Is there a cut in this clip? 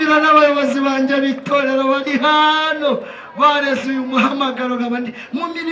no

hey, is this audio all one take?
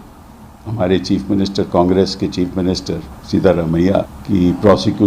no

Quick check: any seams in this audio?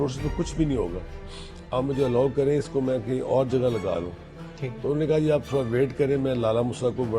no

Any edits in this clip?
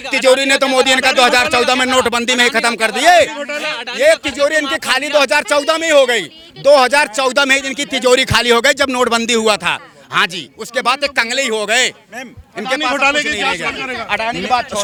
no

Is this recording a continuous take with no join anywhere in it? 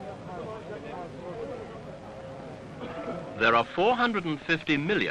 no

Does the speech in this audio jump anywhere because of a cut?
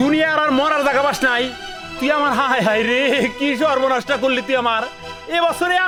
no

